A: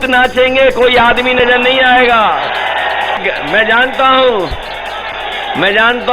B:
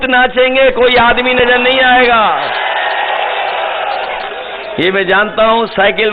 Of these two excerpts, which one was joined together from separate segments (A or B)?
A